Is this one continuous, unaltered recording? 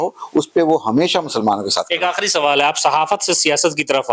yes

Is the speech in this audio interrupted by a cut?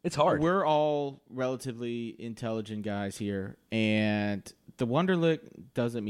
no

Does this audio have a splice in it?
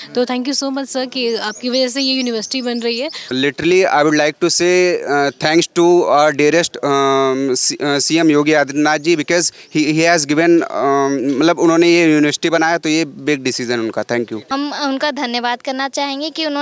yes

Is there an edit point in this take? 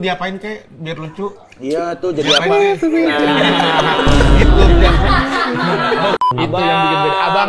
yes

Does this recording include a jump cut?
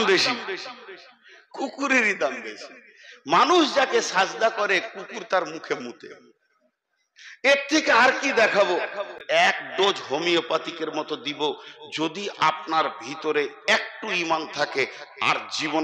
yes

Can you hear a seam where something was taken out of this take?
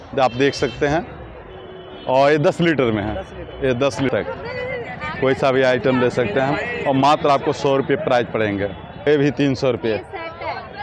yes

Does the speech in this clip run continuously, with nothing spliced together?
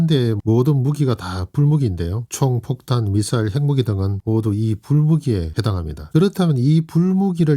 no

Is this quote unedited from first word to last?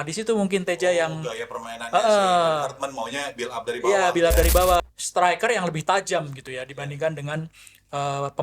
no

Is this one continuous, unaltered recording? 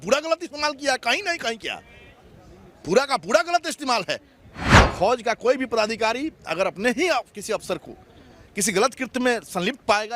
no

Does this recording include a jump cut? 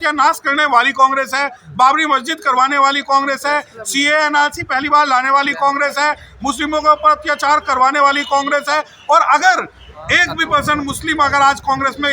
no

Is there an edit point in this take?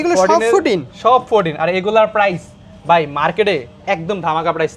no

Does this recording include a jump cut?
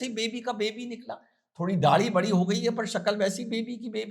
no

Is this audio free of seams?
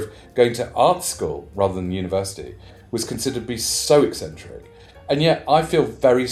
yes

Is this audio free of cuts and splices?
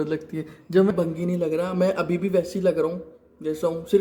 no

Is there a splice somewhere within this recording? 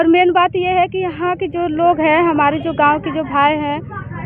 no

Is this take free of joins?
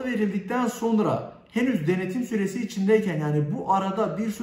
yes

